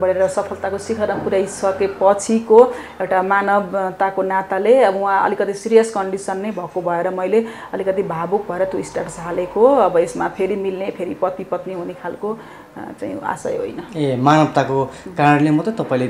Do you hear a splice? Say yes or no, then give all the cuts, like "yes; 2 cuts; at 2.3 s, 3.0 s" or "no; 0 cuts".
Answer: no; 0 cuts